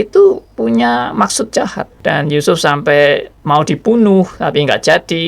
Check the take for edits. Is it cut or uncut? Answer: cut